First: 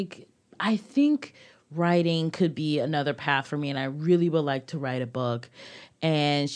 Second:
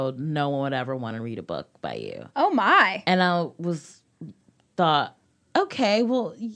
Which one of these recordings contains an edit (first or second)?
second